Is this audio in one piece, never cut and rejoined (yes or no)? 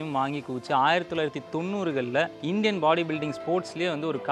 no